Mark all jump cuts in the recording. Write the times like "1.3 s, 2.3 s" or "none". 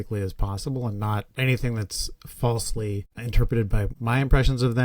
3.9 s